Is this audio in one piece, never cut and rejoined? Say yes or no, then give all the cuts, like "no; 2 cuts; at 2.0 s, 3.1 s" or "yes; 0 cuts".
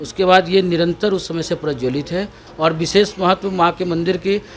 no; 1 cut; at 2.4 s